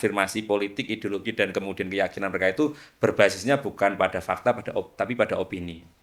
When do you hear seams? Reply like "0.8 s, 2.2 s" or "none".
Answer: none